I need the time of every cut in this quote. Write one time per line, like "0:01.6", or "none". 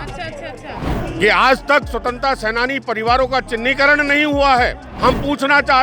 0:00.8
0:04.9